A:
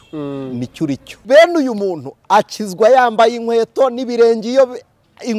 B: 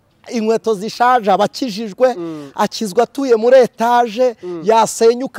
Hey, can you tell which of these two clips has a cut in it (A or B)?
A